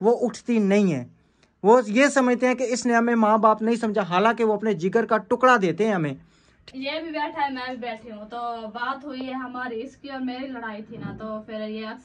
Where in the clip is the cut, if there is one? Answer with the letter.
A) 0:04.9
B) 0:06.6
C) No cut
B